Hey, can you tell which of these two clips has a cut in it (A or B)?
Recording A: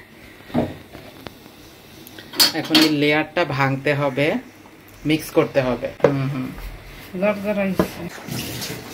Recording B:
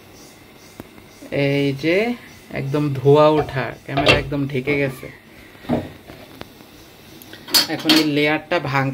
A